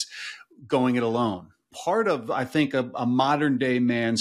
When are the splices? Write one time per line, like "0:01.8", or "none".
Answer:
0:01.7